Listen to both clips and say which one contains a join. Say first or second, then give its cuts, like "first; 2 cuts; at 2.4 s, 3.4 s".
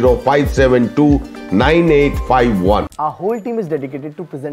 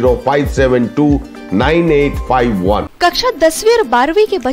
second; 1 cut; at 2.9 s